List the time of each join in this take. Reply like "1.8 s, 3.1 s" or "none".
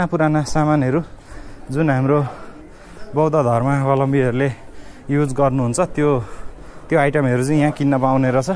none